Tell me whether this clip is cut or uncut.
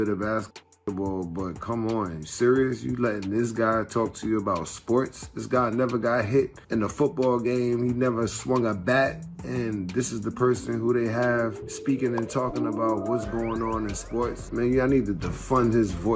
cut